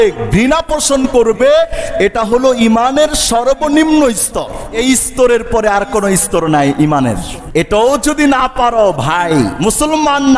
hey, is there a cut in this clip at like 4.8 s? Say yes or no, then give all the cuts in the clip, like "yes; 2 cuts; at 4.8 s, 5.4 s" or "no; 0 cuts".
yes; 3 cuts; at 4.8 s, 7.3 s, 9.6 s